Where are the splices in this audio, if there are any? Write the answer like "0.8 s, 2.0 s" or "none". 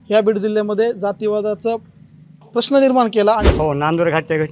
3.5 s

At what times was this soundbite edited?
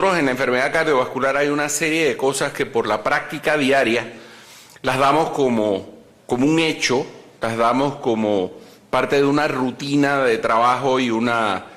8.5 s

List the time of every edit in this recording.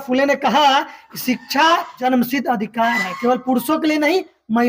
1.9 s

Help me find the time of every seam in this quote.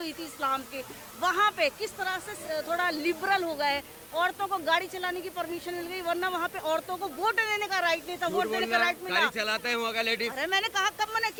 none

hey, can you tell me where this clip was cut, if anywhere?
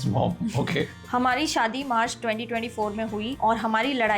1.0 s

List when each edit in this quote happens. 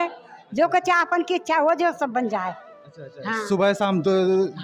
none

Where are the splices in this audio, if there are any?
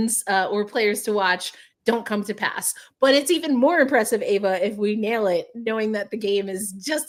none

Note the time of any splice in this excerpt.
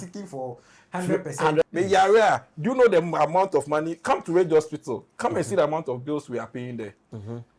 1.6 s

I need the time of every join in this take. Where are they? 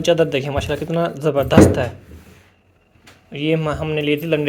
none

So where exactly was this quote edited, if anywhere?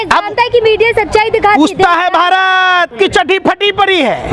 2.9 s

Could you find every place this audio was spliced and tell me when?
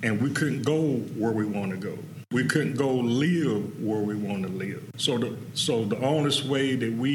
2.2 s, 4.9 s

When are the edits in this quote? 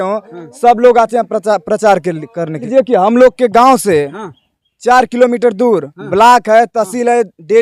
2.6 s

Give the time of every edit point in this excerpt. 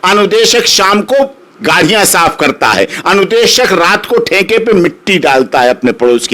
none

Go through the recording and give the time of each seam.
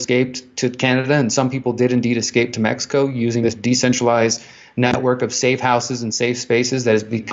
none

